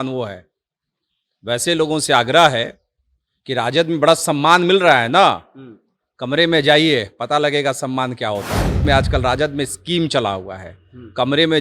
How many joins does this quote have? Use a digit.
1